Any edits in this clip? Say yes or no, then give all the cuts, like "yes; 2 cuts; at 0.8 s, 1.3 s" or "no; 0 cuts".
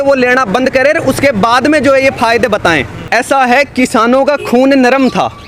yes; 1 cut; at 2.9 s